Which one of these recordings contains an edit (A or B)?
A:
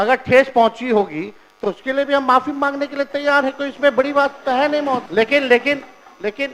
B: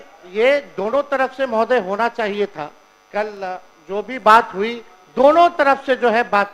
A